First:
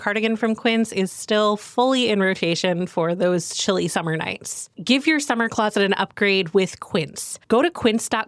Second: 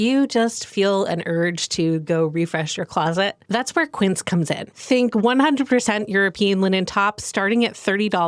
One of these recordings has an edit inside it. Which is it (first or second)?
second